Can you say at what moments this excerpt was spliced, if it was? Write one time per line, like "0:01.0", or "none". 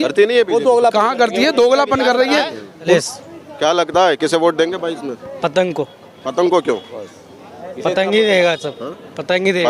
0:02.9

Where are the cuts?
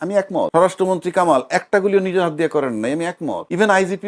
none

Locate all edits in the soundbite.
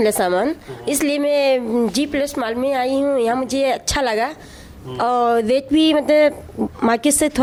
none

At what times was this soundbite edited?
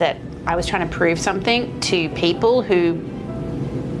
none

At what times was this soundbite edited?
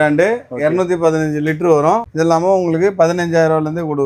0:02.1

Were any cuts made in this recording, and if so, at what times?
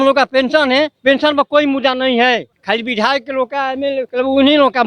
0:00.9
0:02.6
0:04.1

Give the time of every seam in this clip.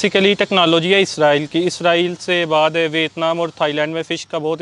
none

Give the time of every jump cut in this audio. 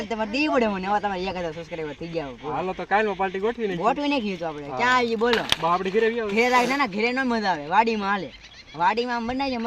none

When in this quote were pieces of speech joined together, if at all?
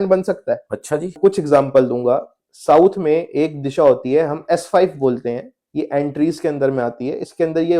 0:01.1

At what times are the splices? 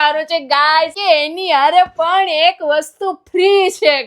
0:01.0

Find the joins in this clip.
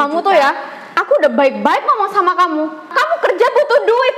0:02.9

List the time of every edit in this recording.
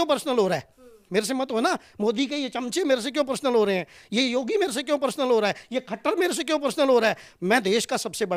none

